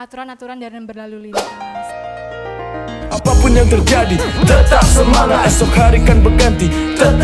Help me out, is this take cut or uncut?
cut